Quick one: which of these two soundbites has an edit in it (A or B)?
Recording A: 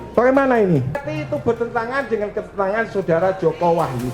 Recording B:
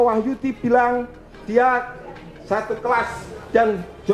A